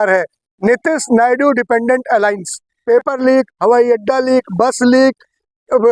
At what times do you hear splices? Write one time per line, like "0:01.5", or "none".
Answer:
0:02.7